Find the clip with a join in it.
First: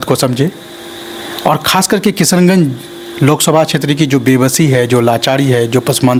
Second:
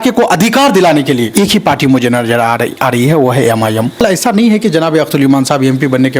second; 2 cuts; at 1.3 s, 4.0 s

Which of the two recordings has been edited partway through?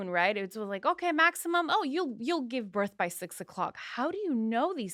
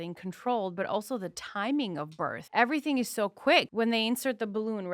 second; 2 cuts; at 2.4 s, 3.7 s

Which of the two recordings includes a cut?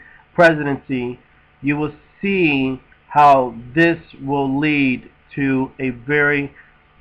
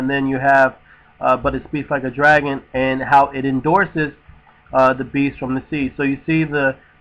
first; 1 cut; at 2.0 s

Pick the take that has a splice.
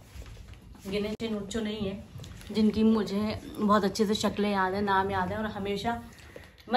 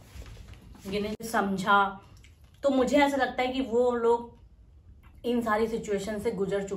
second; 1 cut; at 1.2 s

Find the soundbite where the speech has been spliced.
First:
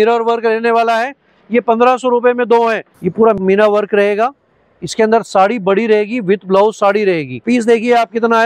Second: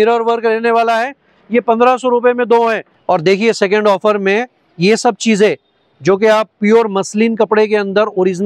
first; 2 cuts; at 2.9 s, 7.4 s

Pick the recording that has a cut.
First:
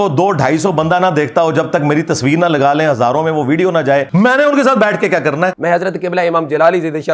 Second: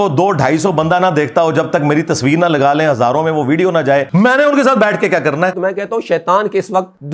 second; 1 cut; at 5.6 s

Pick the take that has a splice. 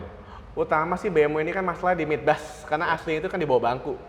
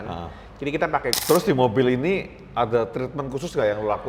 second; 1 cut; at 1.2 s

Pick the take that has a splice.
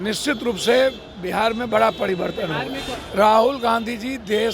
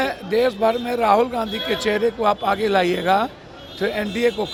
first; 1 cut; at 3.0 s

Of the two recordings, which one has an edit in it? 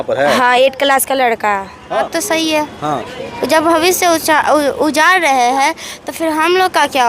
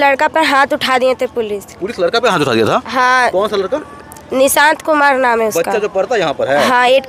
first; 1 cut; at 2.1 s

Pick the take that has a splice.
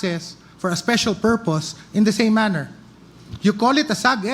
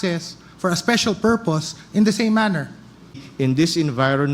second; 1 cut; at 3.2 s

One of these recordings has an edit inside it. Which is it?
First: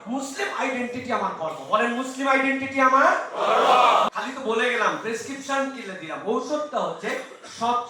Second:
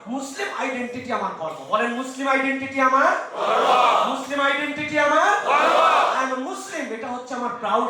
first; 1 cut; at 4.1 s

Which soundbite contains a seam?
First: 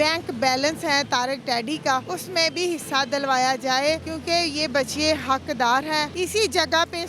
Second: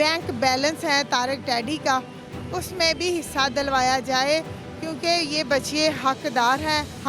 first; 3 cuts; at 2.1 s, 4.1 s, 6.1 s

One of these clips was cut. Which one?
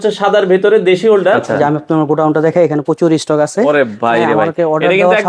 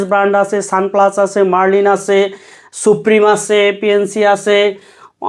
first; 1 cut; at 1.4 s

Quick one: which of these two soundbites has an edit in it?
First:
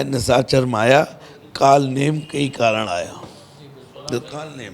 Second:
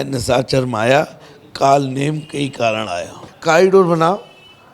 second; 1 cut; at 3.3 s

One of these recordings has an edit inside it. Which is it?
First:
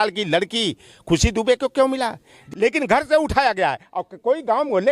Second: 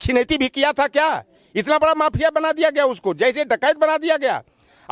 first; 1 cut; at 2.4 s

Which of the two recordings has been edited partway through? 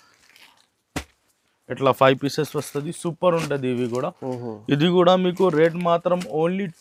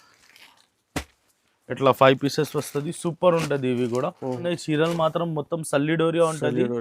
second; 1 cut; at 4.3 s

